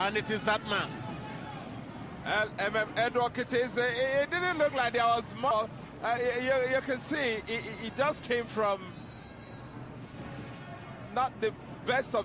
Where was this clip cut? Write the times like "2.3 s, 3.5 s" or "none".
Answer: 5.8 s